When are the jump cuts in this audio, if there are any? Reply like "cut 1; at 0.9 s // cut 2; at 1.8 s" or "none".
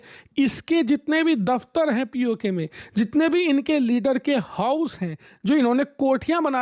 none